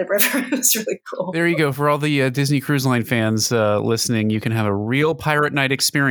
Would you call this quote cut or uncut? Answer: cut